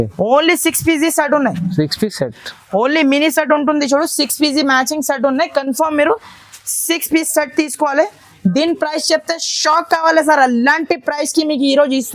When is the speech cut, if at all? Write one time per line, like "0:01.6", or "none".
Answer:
none